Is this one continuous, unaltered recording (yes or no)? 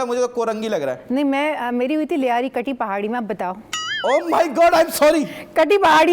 yes